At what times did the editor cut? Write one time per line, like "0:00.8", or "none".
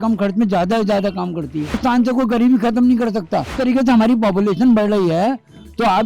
0:01.8
0:03.5